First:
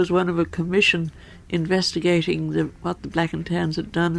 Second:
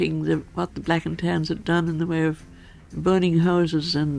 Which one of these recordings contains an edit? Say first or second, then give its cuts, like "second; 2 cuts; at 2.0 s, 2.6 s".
second; 1 cut; at 2.9 s